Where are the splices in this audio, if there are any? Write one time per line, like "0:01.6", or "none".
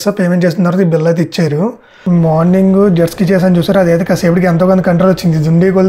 0:01.9